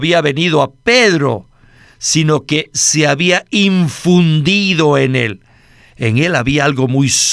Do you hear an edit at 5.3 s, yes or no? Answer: no